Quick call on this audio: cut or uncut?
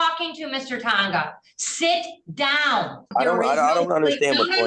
cut